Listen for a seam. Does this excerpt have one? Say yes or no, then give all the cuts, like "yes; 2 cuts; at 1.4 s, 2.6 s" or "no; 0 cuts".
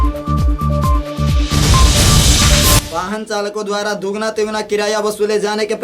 yes; 1 cut; at 2.9 s